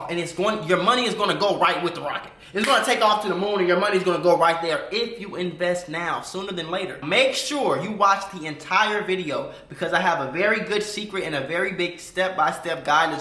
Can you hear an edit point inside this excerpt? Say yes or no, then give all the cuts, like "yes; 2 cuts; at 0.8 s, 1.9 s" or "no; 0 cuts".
yes; 1 cut; at 7.0 s